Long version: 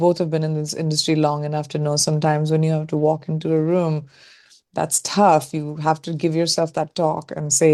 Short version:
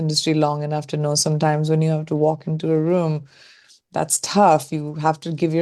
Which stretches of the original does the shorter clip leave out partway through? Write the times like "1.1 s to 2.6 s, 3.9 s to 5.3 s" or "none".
none

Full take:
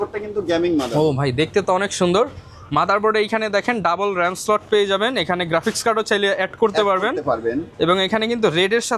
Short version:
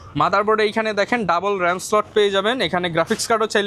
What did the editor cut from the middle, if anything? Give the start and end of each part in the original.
none

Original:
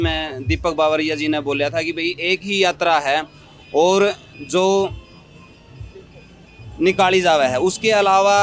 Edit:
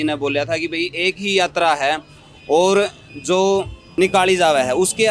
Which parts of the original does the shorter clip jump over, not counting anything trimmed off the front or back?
5.0 s to 6.6 s

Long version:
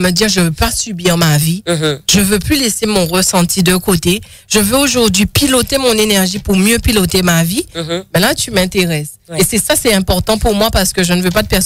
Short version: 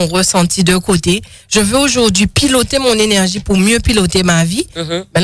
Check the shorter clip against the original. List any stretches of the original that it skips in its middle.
none

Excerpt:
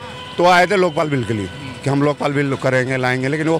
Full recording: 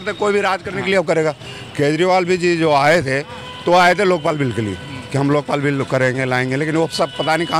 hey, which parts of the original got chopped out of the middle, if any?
none

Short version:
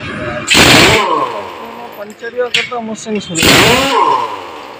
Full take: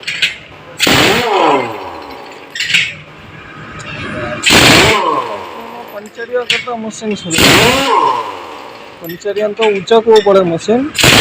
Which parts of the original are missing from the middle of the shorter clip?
none

